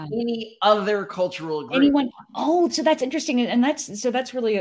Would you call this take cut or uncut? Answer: uncut